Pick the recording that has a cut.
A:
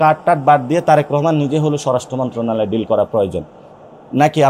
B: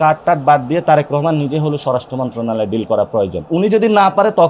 B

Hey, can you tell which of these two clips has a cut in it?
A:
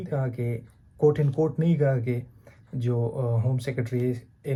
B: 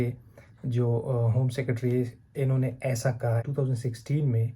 B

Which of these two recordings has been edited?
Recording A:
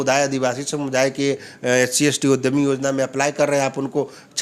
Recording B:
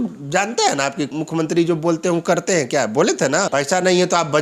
B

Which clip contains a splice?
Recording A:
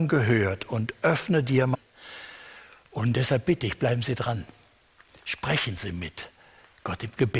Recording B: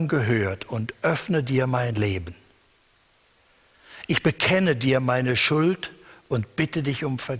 B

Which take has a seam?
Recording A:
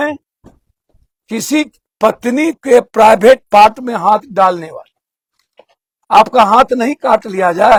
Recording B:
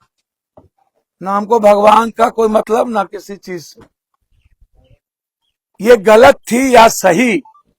B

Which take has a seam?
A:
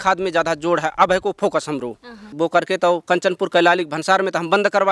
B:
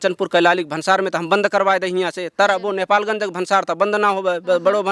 A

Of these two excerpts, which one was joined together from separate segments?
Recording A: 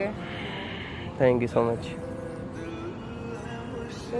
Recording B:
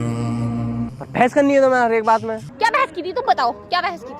B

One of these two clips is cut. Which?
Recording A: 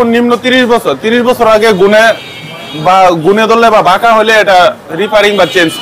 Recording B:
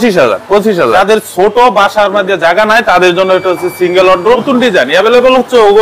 B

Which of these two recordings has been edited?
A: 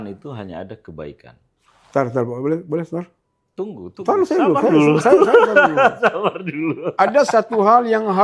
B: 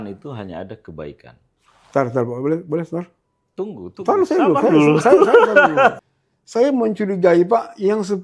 B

